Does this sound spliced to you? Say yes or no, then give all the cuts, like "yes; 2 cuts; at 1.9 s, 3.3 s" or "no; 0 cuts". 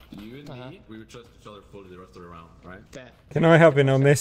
yes; 1 cut; at 3.3 s